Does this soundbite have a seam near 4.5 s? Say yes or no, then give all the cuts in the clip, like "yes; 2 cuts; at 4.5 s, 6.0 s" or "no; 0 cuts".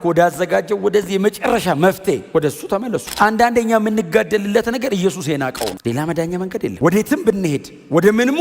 no; 2 cuts; at 3.0 s, 5.7 s